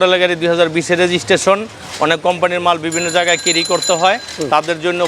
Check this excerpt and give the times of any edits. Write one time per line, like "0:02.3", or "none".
none